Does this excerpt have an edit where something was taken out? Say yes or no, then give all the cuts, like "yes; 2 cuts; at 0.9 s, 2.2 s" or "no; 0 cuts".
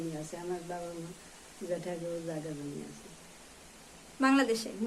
no; 0 cuts